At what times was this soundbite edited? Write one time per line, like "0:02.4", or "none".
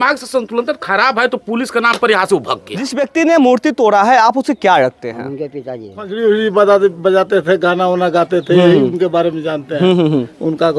0:03.0
0:06.1